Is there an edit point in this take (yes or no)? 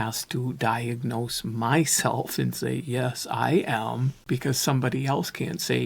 yes